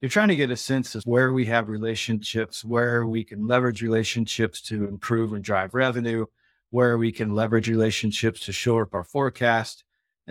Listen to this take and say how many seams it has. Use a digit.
0